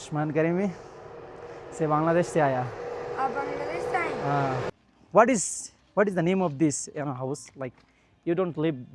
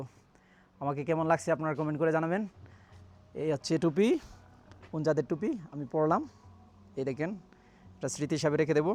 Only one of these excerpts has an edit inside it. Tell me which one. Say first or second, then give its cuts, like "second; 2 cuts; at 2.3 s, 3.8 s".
first; 1 cut; at 4.7 s